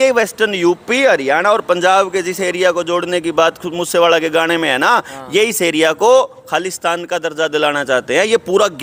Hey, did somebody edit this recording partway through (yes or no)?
no